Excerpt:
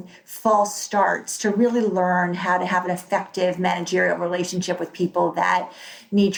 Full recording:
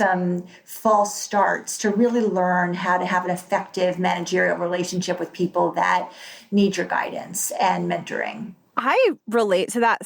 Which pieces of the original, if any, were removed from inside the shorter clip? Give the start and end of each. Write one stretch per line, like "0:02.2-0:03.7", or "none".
none